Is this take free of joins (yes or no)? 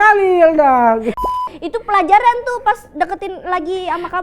no